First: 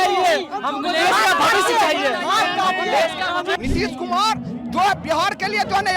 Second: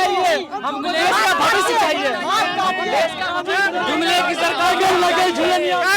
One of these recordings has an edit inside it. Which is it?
first; 1 cut; at 3.6 s

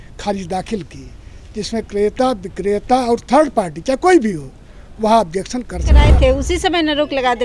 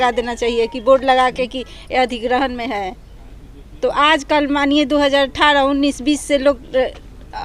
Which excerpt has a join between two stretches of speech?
first; 1 cut; at 5.9 s

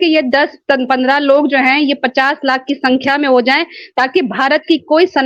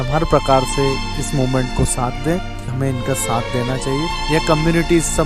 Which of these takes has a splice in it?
second; 1 cut; at 2.7 s

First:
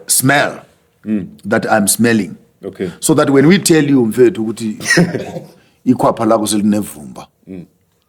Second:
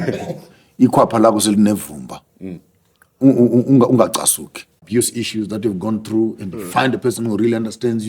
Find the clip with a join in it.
second; 1 cut; at 4.9 s

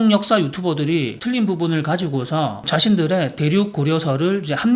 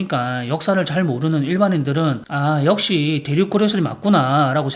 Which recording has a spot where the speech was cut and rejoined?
first; 1 cut; at 2.6 s

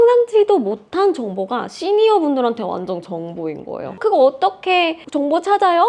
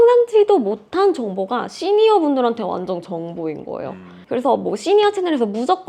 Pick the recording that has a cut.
first; 1 cut; at 3.8 s

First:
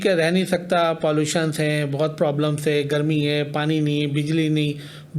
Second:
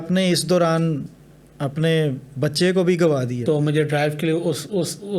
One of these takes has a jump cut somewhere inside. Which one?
second; 1 cut; at 3.4 s

